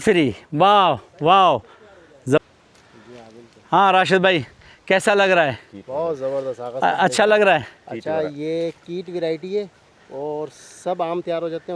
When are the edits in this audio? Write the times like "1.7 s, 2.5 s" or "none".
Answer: none